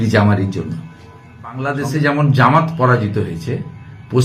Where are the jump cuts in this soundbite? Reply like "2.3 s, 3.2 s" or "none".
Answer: 1.6 s